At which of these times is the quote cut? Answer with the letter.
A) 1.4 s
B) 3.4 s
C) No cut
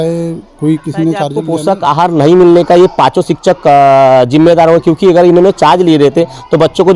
A